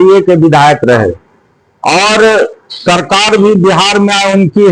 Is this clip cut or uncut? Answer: uncut